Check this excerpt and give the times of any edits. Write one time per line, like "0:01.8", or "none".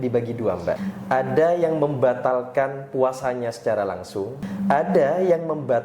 0:00.8
0:04.5